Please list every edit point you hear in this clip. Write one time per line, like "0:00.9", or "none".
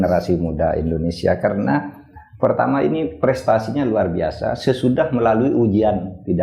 none